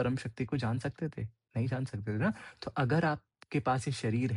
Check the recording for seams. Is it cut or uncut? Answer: uncut